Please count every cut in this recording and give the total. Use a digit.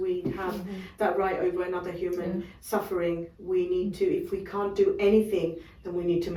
0